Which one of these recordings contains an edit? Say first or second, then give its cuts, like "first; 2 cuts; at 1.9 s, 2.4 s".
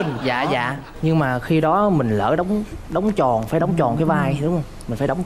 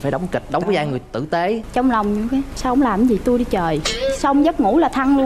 second; 1 cut; at 1.6 s